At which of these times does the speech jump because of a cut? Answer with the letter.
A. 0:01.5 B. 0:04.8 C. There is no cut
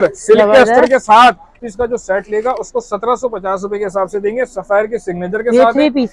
A